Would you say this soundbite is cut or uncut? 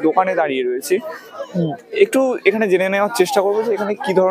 uncut